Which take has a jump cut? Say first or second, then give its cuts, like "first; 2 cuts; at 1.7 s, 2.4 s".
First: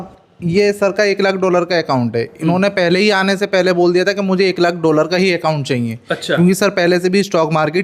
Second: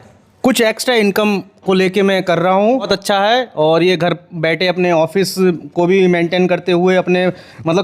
second; 1 cut; at 2.8 s